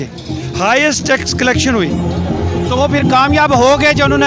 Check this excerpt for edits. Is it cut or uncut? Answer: uncut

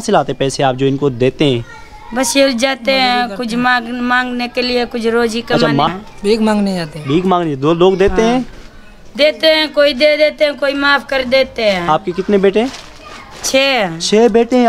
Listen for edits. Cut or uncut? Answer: uncut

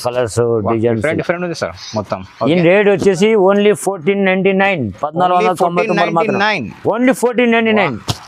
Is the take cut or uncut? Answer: uncut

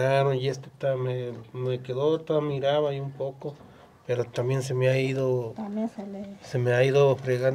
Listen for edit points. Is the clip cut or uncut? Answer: uncut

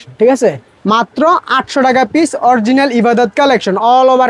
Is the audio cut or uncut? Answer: uncut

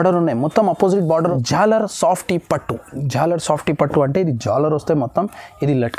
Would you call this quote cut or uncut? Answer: cut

